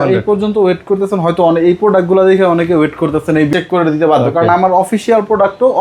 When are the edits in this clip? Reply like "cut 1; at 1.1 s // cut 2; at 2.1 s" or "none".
cut 1; at 3.5 s